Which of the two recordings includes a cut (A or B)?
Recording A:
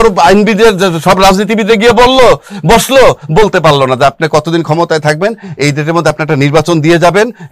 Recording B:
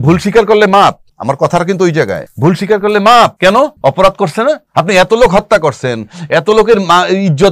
B